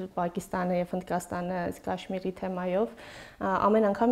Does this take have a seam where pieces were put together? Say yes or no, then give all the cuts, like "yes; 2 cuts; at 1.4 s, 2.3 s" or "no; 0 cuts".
no; 0 cuts